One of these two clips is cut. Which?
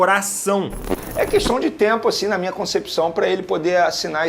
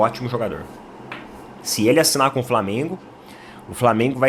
first; 1 cut; at 1.0 s

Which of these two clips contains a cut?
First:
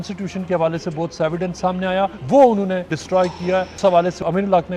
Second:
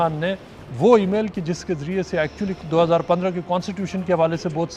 first; 2 cuts; at 2.2 s, 3.0 s

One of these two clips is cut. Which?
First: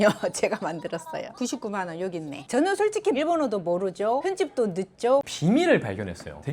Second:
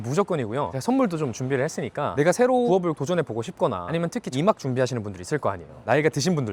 first; 2 cuts; at 2.4 s, 5.2 s

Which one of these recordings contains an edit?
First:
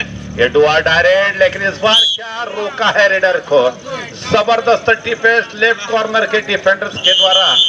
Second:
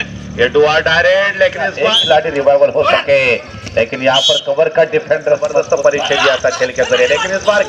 second; 2 cuts; at 1.9 s, 5.5 s

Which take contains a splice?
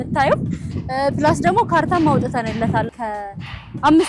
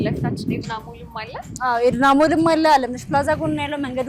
first; 1 cut; at 2.9 s

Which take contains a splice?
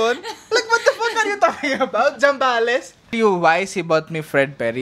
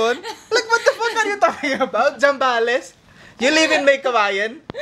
first; 1 cut; at 3.1 s

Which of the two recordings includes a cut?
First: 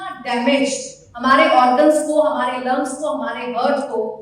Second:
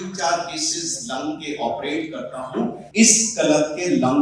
second; 1 cut; at 2.8 s

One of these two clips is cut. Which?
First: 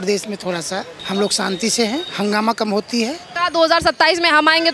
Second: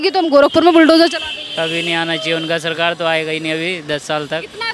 first; 3 cuts; at 1.0 s, 2.1 s, 3.3 s

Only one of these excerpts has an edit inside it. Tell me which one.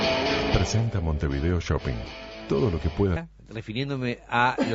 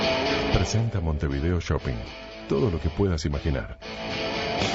second; 1 cut; at 3.2 s

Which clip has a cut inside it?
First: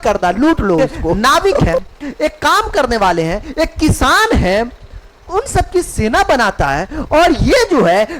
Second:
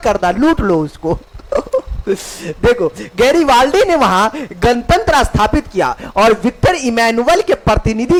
first; 1 cut; at 1.0 s

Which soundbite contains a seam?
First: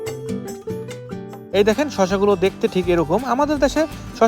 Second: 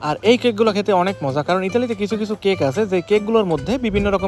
first; 1 cut; at 1.4 s

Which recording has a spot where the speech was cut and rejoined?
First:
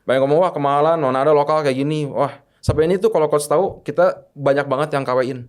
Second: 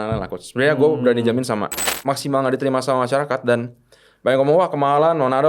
second; 1 cut; at 1.9 s

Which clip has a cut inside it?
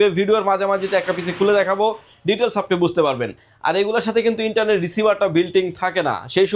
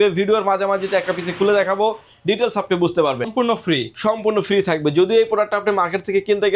second; 1 cut; at 3.3 s

